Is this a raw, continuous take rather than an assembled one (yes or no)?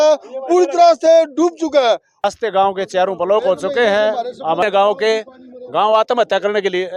no